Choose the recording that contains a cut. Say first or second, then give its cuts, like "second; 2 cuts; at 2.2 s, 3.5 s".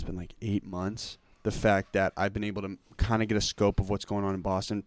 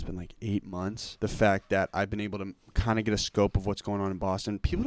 second; 1 cut; at 1.0 s